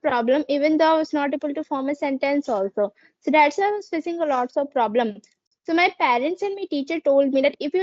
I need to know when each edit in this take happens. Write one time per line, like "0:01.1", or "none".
none